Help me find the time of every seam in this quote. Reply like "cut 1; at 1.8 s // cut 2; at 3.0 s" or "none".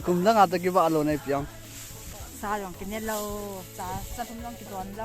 cut 1; at 2.3 s

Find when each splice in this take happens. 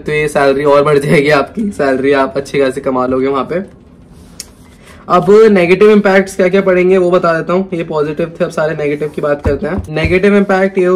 none

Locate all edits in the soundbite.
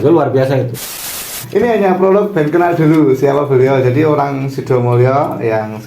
cut 1; at 1.1 s

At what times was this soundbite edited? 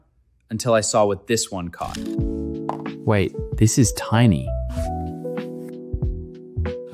cut 1; at 1.9 s

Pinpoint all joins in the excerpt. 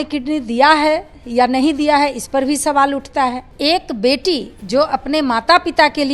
cut 1; at 3.5 s

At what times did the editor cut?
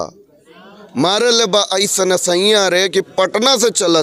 none

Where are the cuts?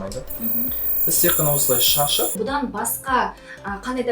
cut 1; at 2.4 s

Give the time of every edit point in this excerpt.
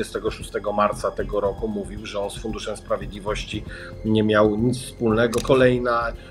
cut 1; at 5.4 s

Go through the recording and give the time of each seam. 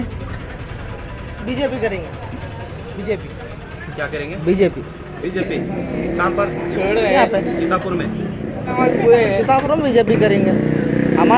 cut 1; at 8.7 s

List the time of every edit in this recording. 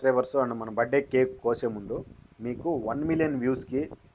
none

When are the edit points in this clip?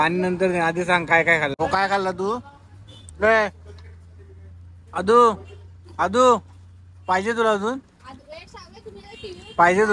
cut 1; at 1.5 s

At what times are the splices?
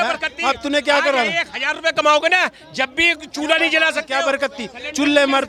none

